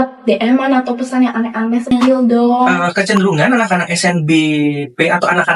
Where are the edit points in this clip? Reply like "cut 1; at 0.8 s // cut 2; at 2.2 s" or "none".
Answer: cut 1; at 2.8 s